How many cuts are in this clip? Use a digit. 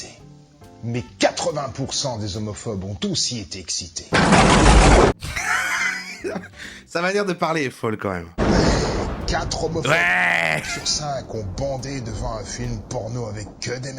2